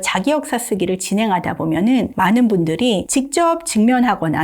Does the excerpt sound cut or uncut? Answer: cut